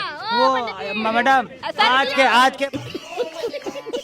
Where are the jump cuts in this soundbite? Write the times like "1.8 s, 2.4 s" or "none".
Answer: 2.6 s